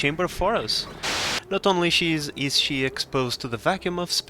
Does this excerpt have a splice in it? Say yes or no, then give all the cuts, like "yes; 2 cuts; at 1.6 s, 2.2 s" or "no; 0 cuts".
yes; 1 cut; at 1.1 s